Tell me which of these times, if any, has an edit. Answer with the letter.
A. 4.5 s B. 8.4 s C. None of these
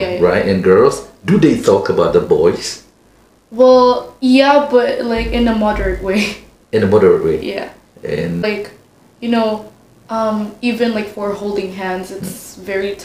B